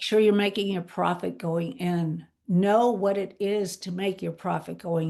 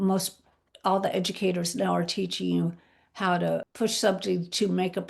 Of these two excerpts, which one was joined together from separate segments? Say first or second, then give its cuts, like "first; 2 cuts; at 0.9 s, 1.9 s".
second; 1 cut; at 3.7 s